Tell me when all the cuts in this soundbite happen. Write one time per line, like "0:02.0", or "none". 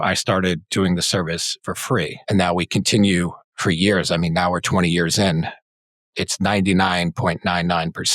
0:02.2
0:03.4